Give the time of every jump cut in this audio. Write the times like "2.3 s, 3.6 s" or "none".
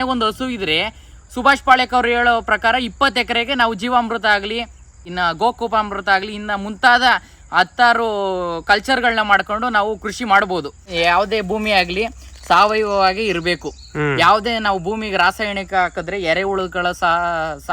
5.1 s, 10.8 s